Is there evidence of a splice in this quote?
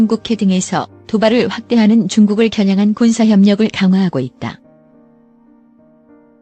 yes; 1 cut; at 4.6 s

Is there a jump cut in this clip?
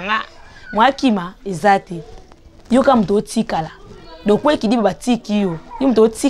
no; 0 cuts

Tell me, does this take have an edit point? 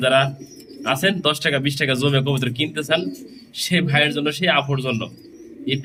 no; 0 cuts

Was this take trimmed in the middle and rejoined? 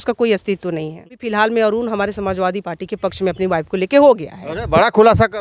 yes; 1 cut; at 1.2 s

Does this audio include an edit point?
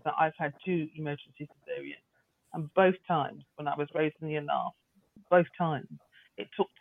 yes; 1 cut; at 5.2 s

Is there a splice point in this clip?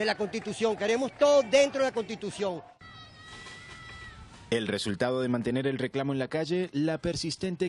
yes; 1 cut; at 4.8 s

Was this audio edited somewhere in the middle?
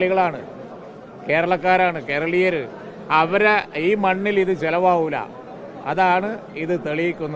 no; 0 cuts

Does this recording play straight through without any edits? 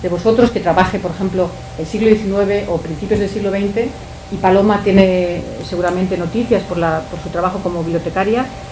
yes; 0 cuts

